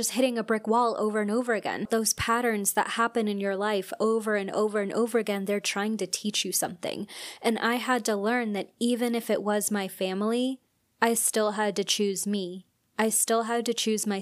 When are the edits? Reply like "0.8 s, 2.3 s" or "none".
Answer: 1.9 s